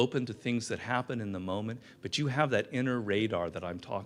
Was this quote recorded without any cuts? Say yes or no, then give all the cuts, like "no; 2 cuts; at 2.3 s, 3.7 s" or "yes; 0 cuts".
yes; 0 cuts